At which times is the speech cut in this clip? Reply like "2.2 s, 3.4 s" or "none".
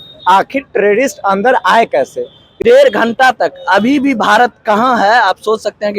2.4 s